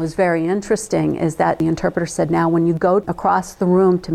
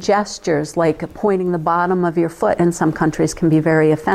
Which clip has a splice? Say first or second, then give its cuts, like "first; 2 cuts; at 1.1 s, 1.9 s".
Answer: first; 2 cuts; at 1.6 s, 3.1 s